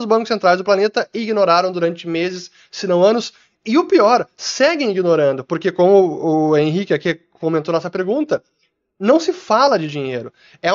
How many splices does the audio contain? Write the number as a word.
zero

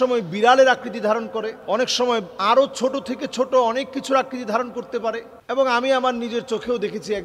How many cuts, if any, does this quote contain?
one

